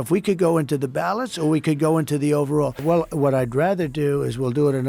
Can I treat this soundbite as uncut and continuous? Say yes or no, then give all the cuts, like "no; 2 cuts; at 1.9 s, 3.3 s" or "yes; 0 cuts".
no; 1 cut; at 2.8 s